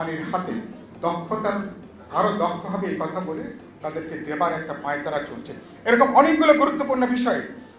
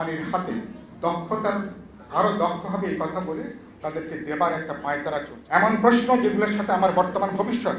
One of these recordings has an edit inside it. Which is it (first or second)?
second